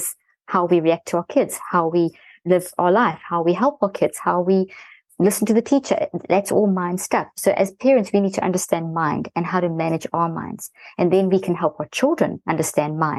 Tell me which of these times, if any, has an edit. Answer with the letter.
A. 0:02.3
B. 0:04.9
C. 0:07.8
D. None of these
A